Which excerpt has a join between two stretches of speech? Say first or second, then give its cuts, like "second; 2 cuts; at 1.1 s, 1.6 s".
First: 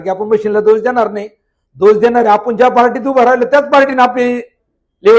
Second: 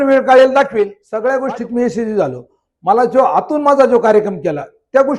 second; 1 cut; at 1.0 s